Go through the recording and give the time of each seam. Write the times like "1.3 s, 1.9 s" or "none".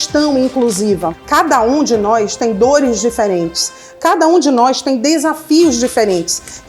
1.2 s